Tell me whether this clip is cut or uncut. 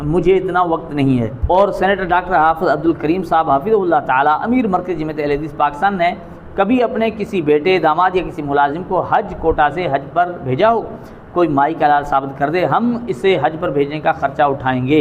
cut